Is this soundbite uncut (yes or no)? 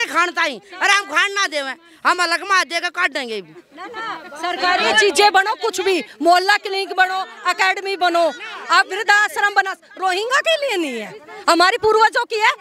yes